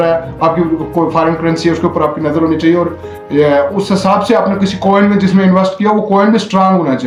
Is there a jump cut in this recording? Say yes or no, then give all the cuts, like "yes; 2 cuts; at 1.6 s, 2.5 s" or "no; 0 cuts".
no; 0 cuts